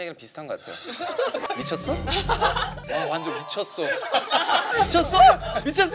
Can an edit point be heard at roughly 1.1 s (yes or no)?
no